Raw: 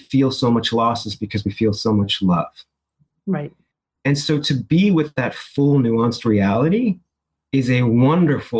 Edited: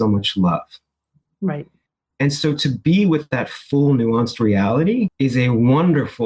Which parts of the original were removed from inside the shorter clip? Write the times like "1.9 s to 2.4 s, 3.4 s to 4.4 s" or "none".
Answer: 7.0 s to 7.5 s